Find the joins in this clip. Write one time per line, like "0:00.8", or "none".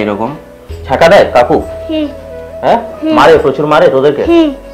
none